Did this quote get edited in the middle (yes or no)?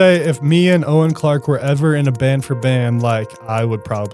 no